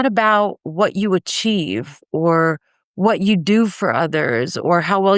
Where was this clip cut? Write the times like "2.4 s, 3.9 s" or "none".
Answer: none